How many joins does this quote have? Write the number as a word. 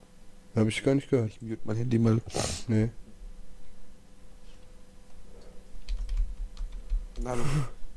zero